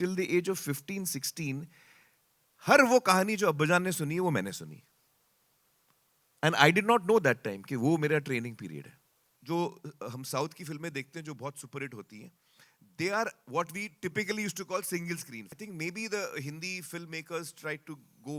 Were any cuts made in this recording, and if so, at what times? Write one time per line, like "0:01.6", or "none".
0:09.3
0:15.5